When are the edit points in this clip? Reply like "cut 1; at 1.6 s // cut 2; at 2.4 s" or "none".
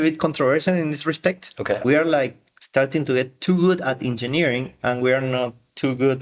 cut 1; at 1.8 s